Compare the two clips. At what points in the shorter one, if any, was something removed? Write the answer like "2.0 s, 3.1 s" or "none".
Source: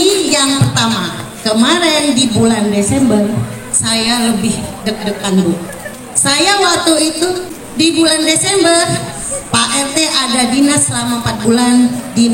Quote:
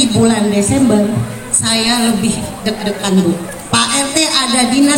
3.5 s

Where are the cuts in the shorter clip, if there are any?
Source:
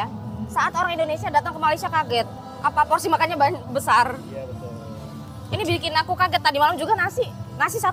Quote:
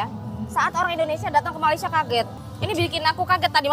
2.4 s

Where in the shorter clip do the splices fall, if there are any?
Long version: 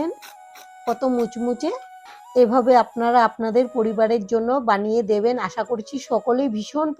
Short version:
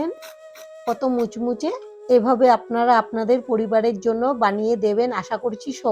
1.9 s

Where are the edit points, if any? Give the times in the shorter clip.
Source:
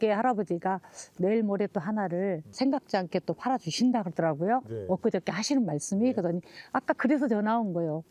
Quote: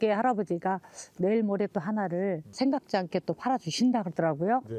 none

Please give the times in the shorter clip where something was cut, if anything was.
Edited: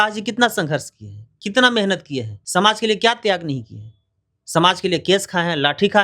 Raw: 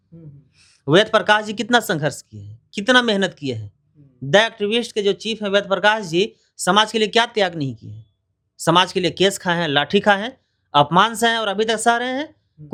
2.3 s

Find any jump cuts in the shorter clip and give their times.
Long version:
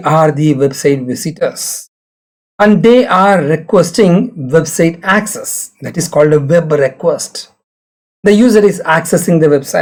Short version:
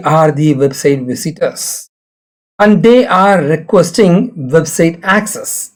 none

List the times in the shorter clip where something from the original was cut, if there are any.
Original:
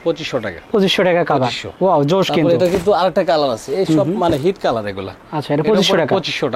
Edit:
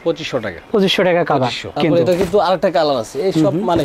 1.8 s

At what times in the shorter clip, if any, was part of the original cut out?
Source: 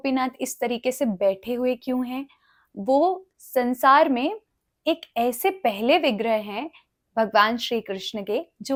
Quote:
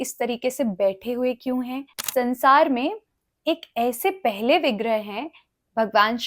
1.9 s

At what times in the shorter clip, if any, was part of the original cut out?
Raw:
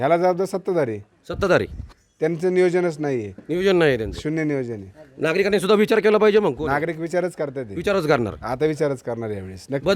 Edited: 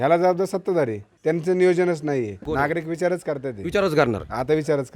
1.1 s, 2.5 s

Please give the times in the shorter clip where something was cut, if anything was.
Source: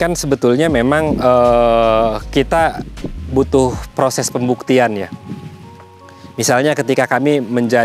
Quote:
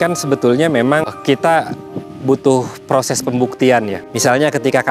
1.1 s, 4.0 s

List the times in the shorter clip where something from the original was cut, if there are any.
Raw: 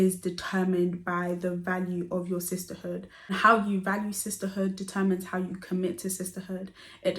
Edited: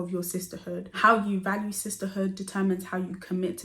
0.9 s

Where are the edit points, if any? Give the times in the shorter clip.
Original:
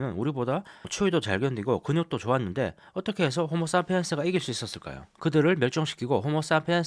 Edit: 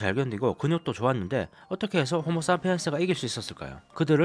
none

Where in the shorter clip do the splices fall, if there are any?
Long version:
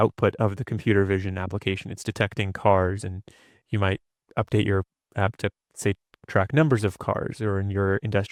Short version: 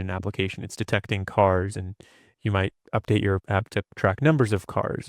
2.8 s, 3.7 s

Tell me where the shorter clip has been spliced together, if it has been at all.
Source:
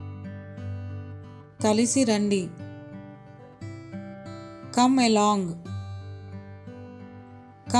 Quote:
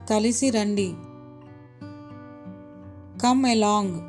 none

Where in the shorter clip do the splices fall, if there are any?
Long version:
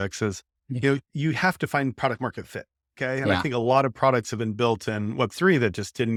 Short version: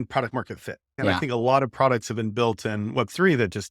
1.0 s

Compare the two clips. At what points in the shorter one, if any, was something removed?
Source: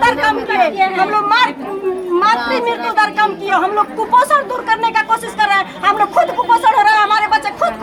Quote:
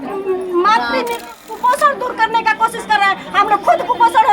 1.3 s

